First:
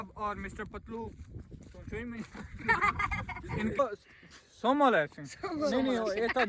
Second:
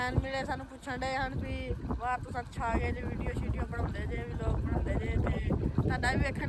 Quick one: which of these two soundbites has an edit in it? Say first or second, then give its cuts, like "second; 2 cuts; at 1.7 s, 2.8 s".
first; 1 cut; at 3.7 s